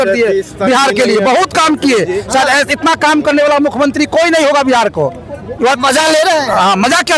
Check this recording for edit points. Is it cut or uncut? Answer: uncut